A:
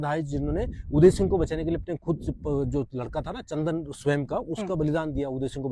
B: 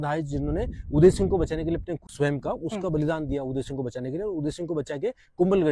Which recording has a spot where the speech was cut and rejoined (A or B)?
B